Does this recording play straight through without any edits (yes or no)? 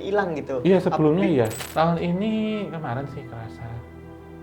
no